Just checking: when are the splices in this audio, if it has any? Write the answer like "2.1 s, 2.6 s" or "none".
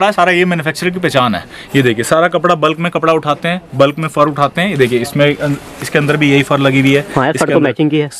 none